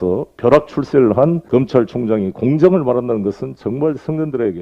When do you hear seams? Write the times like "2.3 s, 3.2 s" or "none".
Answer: 1.4 s